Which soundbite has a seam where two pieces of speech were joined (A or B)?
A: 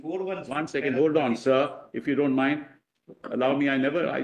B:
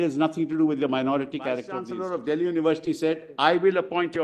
B